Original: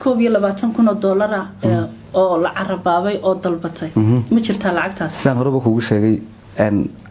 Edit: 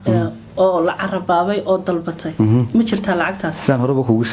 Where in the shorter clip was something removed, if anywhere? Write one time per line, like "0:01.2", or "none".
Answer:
none